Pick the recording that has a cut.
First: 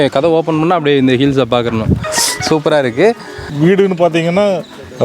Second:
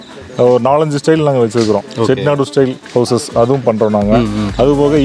first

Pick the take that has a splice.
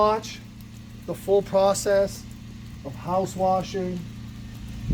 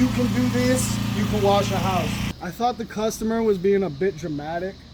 second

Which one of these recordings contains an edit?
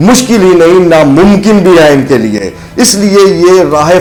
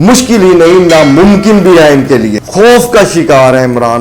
second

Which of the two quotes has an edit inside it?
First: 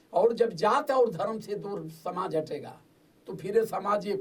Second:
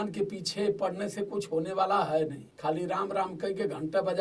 second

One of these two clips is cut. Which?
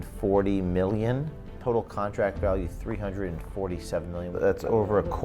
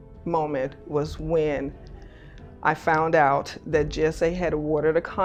first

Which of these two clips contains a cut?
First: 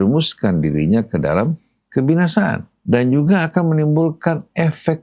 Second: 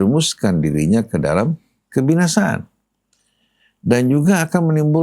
first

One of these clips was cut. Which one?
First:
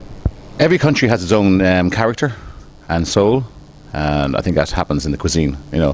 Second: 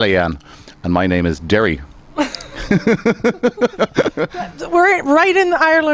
second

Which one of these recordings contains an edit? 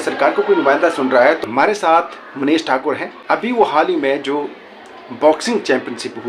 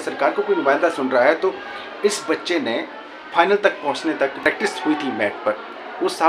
first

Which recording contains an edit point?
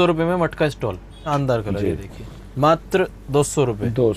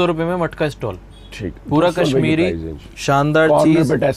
first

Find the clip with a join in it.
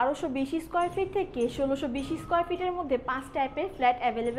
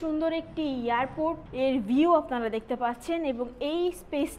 second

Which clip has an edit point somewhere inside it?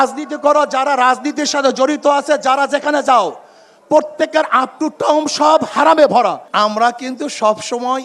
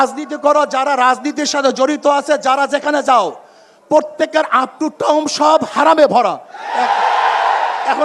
first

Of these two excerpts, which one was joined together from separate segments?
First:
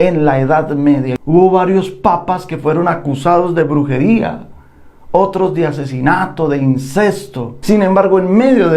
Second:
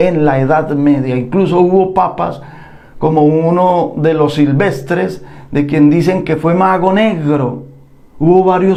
first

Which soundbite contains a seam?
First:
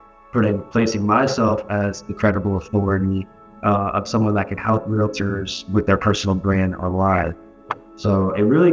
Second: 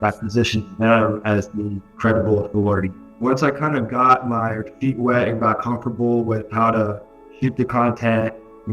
second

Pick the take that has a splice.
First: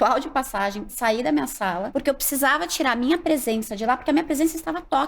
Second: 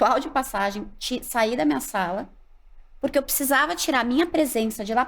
first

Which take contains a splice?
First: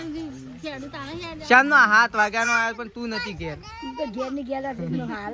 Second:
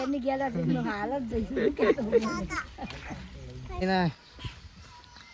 second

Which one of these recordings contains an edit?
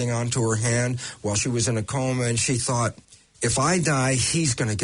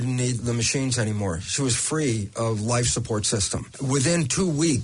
second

